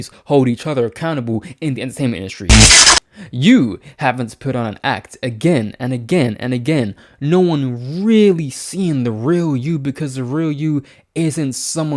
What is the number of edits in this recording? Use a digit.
1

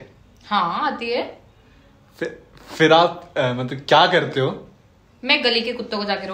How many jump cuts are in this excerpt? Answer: 0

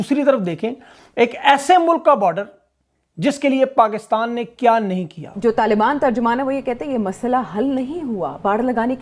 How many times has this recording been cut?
1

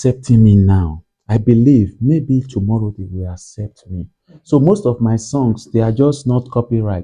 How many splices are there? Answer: 0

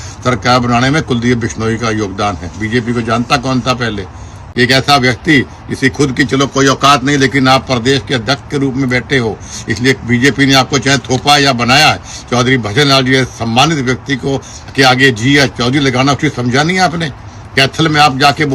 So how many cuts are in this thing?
1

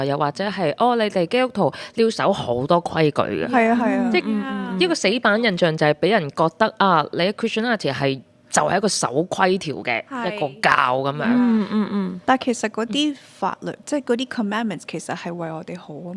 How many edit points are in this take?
0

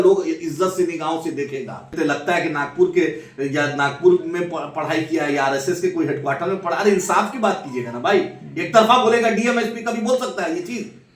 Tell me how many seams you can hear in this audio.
1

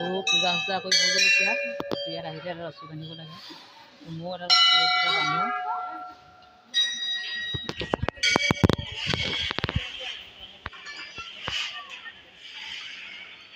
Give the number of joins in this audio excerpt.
0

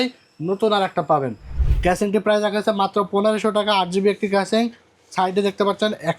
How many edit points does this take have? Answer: 1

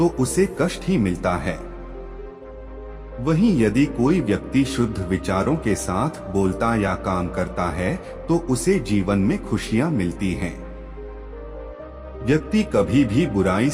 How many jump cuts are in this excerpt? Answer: 2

